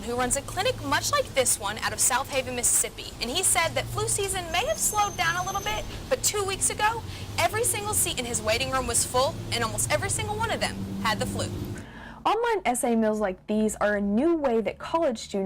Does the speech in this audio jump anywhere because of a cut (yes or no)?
yes